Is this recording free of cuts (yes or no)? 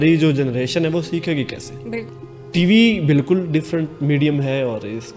no